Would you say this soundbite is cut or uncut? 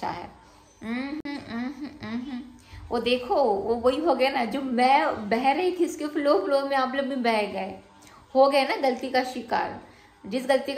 uncut